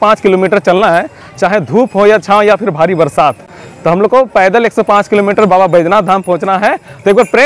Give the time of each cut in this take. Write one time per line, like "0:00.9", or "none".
none